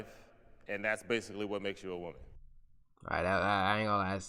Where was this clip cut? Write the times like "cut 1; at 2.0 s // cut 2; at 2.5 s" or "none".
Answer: none